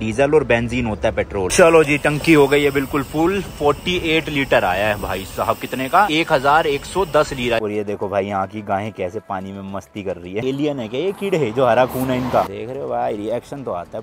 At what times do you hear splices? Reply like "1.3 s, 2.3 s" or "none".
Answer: 1.5 s, 6.1 s, 7.6 s, 10.4 s, 12.6 s